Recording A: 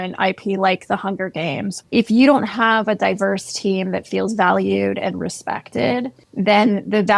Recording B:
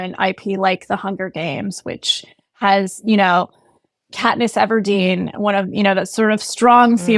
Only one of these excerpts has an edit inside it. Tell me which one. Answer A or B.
A